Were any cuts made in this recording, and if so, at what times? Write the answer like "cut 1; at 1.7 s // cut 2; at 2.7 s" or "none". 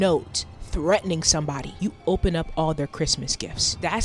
none